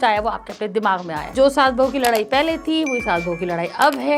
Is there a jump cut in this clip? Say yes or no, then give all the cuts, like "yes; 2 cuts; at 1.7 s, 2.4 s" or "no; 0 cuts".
yes; 1 cut; at 1.3 s